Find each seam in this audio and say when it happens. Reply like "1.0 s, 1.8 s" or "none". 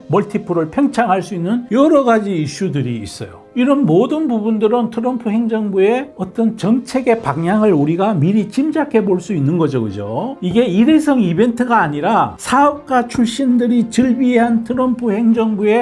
3.4 s, 10.3 s